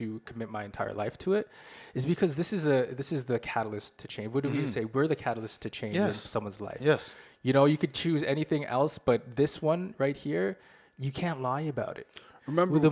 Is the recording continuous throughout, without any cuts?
yes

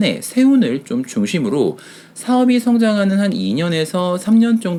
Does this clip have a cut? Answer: no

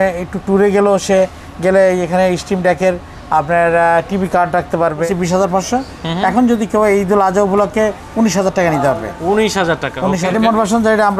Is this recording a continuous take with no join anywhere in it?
no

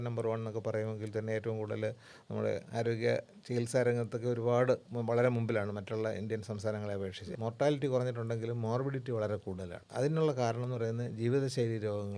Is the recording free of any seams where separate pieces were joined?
no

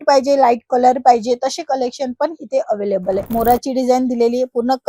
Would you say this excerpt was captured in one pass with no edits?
no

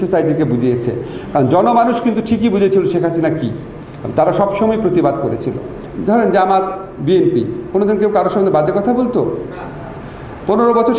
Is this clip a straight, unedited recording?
no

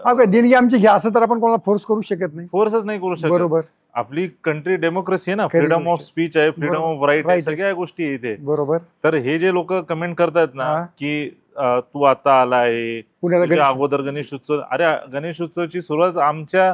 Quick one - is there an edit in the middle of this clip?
no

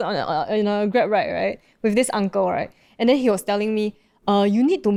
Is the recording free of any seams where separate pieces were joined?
yes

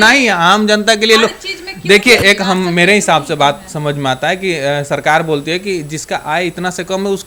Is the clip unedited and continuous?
yes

